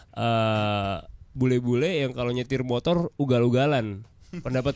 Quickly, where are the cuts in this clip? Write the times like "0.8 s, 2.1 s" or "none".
none